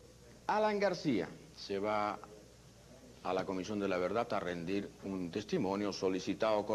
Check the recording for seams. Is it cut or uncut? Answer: uncut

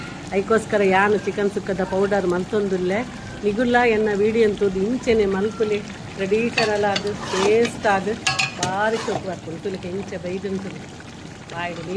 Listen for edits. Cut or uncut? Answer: uncut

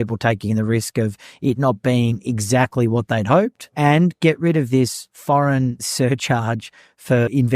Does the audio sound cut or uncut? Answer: cut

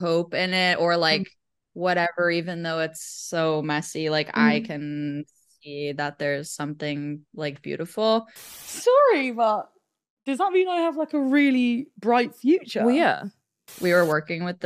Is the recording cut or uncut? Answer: cut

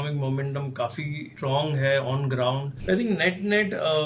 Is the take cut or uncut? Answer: cut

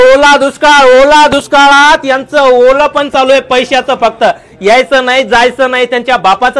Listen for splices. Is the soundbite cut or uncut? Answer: uncut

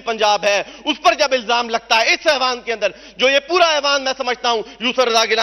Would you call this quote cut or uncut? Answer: uncut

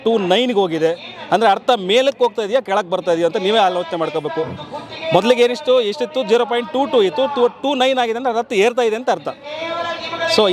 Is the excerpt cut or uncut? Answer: uncut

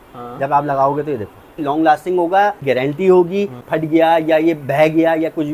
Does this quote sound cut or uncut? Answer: cut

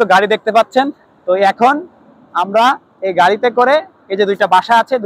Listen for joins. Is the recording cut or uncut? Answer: uncut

